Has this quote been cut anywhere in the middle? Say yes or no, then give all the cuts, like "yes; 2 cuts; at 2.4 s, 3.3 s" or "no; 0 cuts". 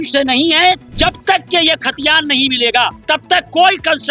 yes; 2 cuts; at 0.9 s, 3.0 s